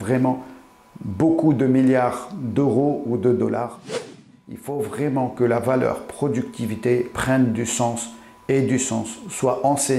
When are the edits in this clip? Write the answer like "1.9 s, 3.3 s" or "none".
4.1 s